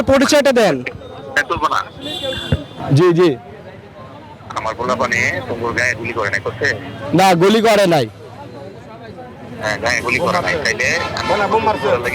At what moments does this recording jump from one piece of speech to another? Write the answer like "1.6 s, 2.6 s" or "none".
2.8 s